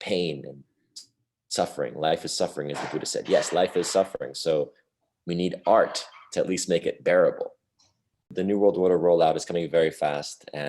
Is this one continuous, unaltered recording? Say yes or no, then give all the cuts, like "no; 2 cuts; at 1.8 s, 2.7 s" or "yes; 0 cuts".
no; 1 cut; at 8.3 s